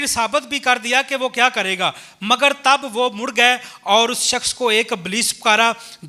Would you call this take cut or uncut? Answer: uncut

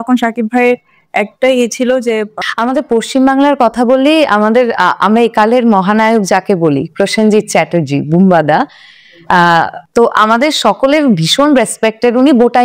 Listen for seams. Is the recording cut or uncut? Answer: cut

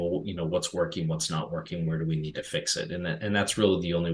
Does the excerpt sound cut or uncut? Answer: uncut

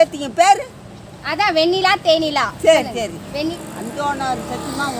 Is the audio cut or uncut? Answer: cut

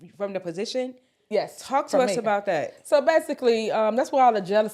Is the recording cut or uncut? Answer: uncut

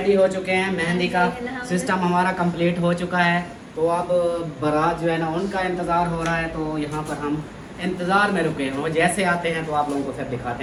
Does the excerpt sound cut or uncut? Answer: uncut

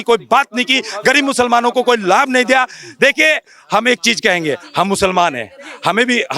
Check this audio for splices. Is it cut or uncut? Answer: uncut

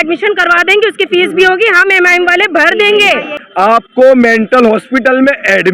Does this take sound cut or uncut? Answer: cut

